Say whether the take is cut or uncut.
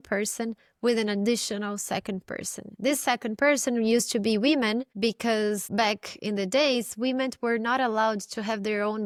uncut